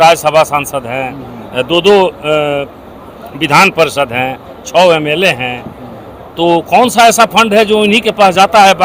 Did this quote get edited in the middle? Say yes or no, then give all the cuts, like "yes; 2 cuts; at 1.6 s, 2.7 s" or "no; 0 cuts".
no; 0 cuts